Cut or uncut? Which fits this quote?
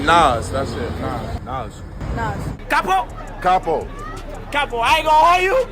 cut